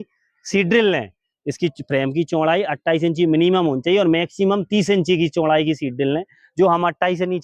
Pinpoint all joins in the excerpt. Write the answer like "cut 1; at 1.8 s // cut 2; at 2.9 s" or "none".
none

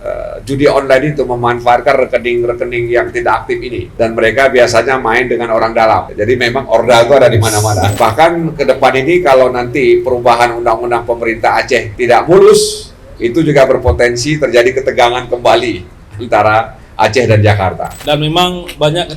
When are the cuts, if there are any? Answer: cut 1; at 7.9 s // cut 2; at 17.9 s

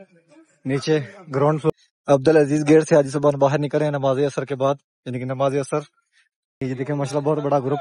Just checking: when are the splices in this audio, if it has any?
cut 1; at 1.7 s // cut 2; at 6.6 s

